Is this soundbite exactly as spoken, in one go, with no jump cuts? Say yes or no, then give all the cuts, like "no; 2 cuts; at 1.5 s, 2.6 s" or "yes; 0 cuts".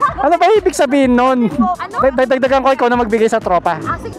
no; 1 cut; at 1.8 s